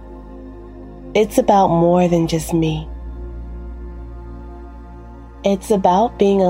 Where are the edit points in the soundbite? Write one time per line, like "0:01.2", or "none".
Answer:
0:00.9